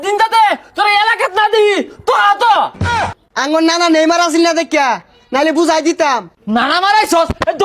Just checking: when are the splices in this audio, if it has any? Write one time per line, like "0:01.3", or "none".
0:02.8
0:06.3